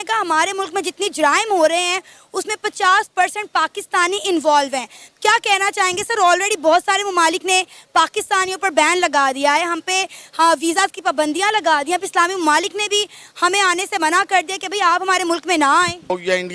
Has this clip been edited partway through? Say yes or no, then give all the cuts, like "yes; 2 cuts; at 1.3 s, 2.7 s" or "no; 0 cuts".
no; 0 cuts